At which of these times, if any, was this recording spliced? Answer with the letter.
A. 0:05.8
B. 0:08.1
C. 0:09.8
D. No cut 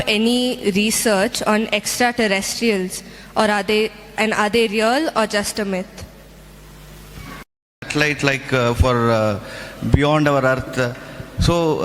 D